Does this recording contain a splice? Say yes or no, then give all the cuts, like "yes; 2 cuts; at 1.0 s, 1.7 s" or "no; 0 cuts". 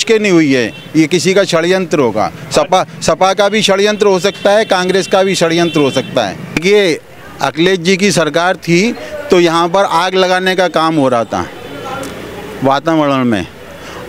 yes; 1 cut; at 6.6 s